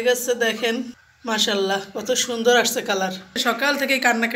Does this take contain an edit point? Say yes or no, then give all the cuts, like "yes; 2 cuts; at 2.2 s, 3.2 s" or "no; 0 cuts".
yes; 2 cuts; at 1.1 s, 3.4 s